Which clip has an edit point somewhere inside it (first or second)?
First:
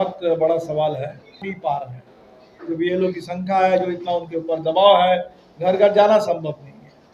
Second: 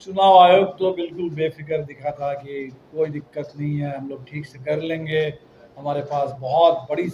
first